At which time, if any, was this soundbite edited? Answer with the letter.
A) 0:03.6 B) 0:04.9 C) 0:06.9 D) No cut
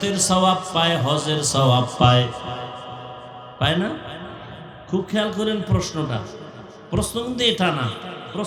D